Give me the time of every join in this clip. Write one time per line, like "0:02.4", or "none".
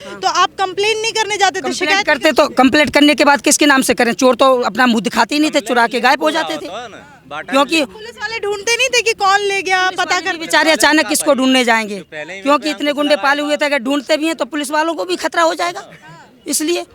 none